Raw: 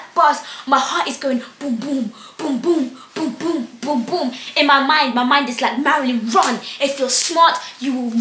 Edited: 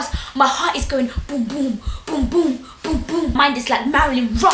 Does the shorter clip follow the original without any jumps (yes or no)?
no